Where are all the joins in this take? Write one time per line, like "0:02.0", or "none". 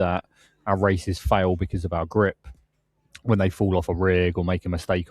none